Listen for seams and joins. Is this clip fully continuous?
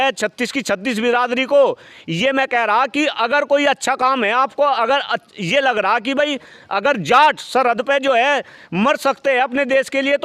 yes; 0 cuts

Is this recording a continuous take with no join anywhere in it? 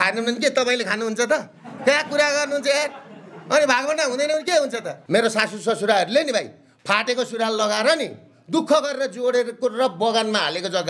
no; 1 cut; at 4.9 s

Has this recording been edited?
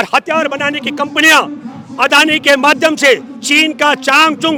no; 0 cuts

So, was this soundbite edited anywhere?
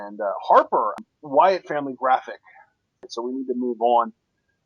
no; 0 cuts

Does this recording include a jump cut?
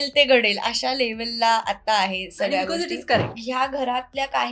yes; 1 cut; at 3.3 s

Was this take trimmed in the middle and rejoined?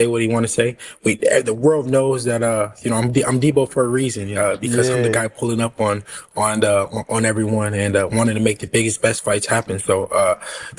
no; 0 cuts

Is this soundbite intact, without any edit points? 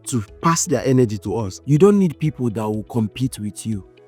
no; 1 cut; at 1.5 s

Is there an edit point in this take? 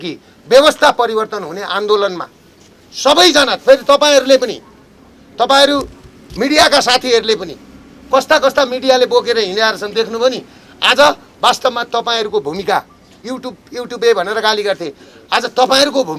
no; 0 cuts

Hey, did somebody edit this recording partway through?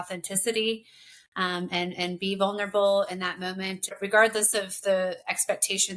yes; 1 cut; at 4.0 s

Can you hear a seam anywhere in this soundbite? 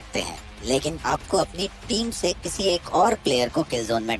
yes; 1 cut; at 0.9 s

